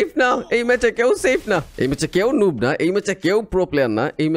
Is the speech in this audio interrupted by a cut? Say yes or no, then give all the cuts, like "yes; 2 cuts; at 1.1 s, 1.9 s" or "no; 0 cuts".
yes; 1 cut; at 1.7 s